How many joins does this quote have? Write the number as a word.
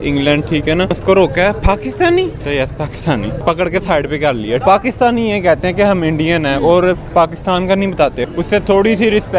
five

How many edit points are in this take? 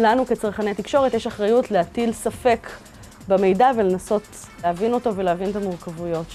one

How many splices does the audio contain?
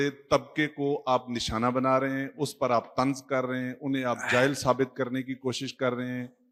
zero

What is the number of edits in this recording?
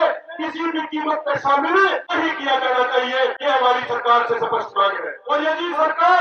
three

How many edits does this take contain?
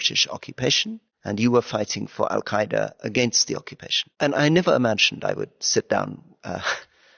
zero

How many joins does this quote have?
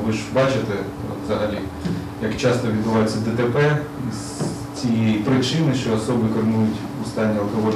zero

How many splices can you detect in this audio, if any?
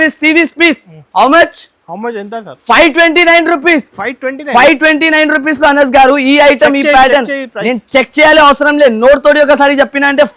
zero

